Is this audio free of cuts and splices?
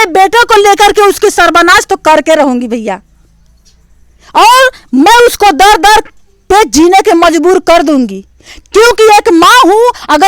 yes; 0 cuts

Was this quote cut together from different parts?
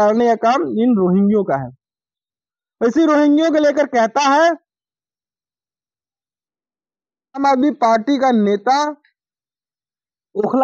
no; 0 cuts

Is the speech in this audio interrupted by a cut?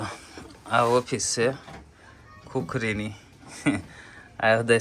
no; 0 cuts

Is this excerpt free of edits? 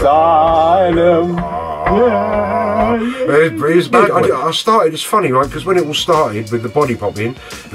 no; 1 cut; at 3.9 s

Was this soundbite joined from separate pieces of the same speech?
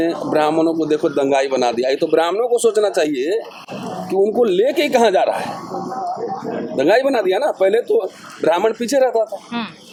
no; 0 cuts

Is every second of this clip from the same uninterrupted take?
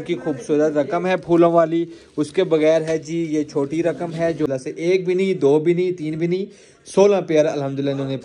no; 1 cut; at 4.5 s

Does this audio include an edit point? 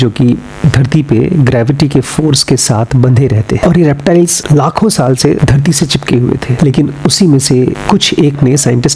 yes; 2 cuts; at 3.6 s, 6.5 s

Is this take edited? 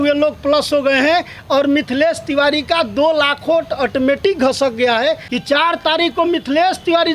yes; 1 cut; at 5.3 s

